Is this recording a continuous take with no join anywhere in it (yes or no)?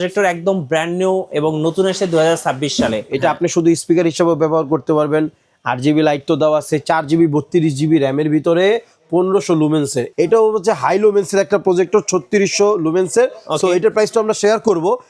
no